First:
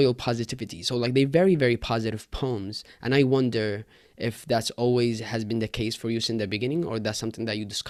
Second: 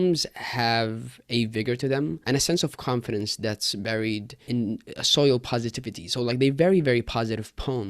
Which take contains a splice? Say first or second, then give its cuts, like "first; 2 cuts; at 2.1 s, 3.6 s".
second; 2 cuts; at 2.2 s, 4.3 s